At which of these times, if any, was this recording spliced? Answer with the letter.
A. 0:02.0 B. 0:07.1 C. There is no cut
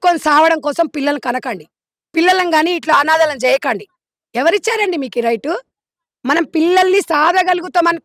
C